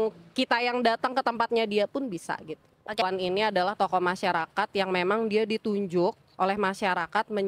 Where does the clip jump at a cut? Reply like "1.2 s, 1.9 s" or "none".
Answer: 3.0 s